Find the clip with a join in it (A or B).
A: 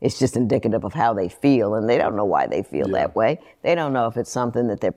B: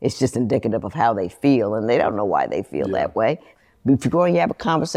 B